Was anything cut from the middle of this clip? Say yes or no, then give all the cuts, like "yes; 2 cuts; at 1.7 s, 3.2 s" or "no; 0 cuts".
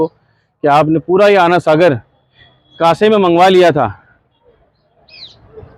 no; 0 cuts